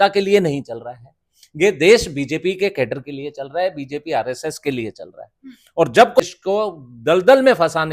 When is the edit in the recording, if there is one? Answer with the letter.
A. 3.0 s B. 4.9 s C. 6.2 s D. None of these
C